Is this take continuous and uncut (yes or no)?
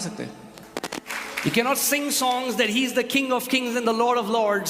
no